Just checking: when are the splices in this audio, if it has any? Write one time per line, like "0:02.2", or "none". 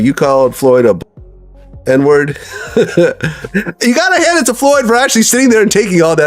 0:03.4